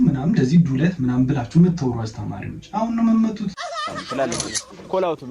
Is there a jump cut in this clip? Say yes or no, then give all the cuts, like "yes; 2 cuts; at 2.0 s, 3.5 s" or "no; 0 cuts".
yes; 1 cut; at 4.0 s